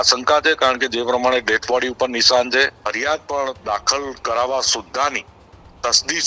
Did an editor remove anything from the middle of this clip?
yes; 1 cut; at 2.8 s

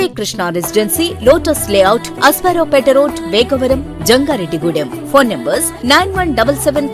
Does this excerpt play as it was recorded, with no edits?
yes; 0 cuts

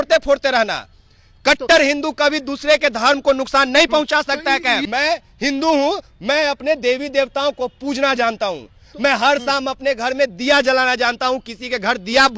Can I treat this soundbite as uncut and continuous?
no; 1 cut; at 4.8 s

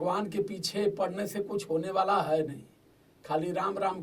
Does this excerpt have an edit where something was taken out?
no; 0 cuts

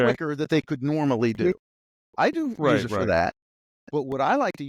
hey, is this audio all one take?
yes; 0 cuts

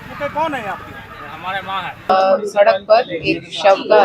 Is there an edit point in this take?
yes; 1 cut; at 2.1 s

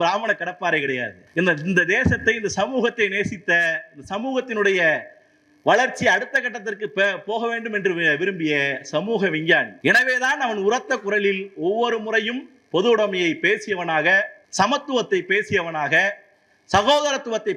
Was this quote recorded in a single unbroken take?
no; 3 cuts; at 1.2 s, 9.7 s, 14.4 s

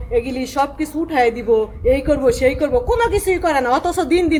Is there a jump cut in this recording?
no; 0 cuts

